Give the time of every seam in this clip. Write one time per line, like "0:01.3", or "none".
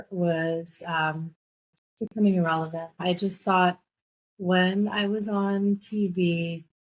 0:03.0